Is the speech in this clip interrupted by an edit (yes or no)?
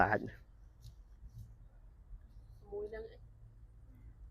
no